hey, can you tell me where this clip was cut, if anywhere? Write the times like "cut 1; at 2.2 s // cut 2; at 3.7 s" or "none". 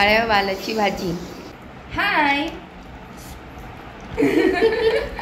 cut 1; at 1.5 s